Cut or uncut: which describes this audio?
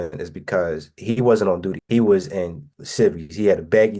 cut